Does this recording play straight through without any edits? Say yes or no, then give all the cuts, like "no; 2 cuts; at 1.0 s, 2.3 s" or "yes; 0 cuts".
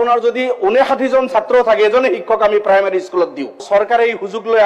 no; 1 cut; at 3.6 s